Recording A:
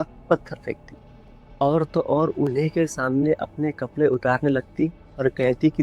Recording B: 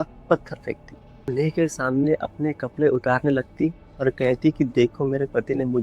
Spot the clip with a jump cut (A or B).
B